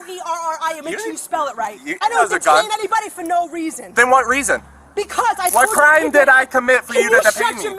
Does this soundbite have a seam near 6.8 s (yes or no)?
no